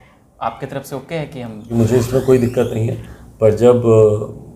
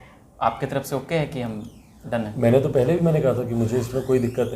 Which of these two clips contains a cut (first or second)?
first